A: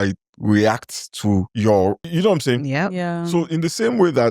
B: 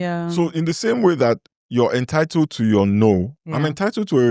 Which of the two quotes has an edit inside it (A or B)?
A